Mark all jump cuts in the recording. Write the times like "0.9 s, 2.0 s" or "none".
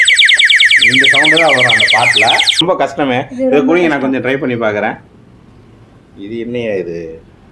2.6 s